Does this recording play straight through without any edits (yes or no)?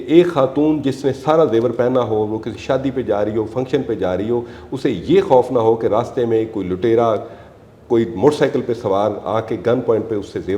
yes